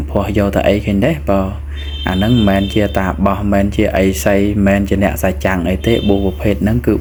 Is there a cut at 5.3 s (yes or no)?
no